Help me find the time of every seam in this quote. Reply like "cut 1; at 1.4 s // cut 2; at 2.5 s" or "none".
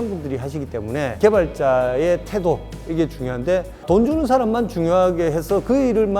cut 1; at 1.2 s // cut 2; at 3.8 s